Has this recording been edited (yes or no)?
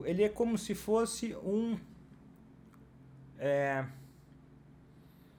no